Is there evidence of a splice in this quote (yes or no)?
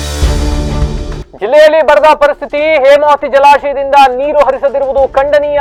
no